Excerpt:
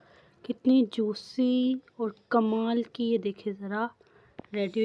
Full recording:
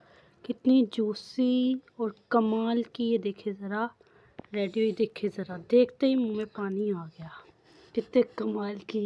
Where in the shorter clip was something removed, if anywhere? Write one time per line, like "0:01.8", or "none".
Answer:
none